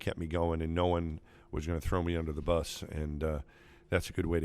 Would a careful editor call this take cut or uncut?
uncut